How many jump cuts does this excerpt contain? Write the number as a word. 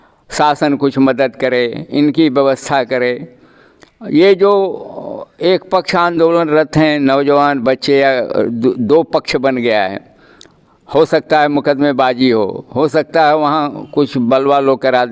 zero